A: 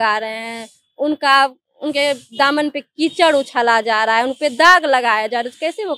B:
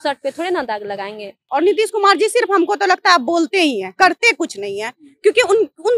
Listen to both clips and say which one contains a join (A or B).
B